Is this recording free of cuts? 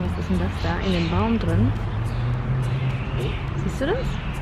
yes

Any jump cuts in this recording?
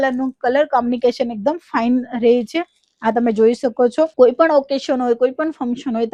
no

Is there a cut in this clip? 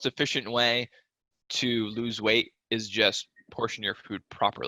no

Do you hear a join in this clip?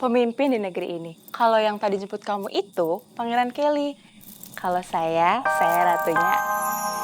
yes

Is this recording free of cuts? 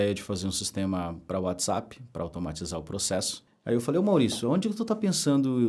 no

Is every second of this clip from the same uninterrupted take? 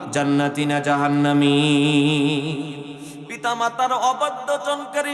no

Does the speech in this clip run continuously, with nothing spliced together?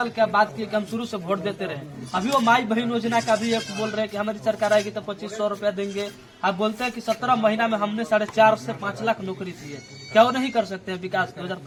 yes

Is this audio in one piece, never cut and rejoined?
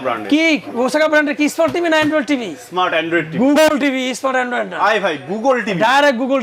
yes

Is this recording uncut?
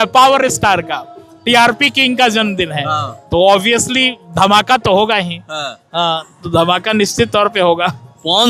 yes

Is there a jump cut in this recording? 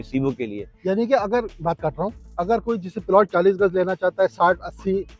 no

